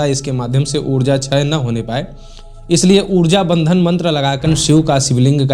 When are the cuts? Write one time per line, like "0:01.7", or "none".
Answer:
0:04.4